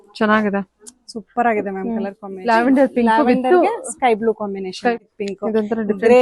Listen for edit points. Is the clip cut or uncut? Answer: cut